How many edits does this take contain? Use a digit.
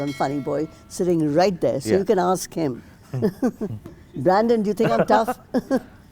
0